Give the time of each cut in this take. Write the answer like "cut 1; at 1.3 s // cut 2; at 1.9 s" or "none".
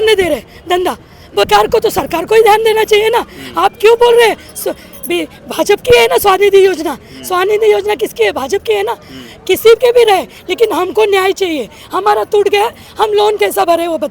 none